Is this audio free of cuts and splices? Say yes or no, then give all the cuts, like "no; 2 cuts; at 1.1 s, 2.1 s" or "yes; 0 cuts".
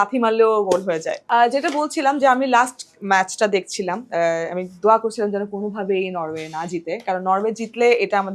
yes; 0 cuts